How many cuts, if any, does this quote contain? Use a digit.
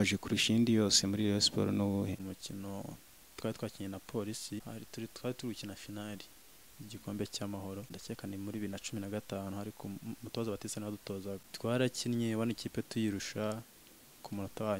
4